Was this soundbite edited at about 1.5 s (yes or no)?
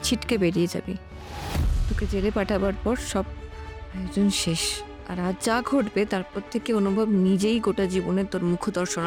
no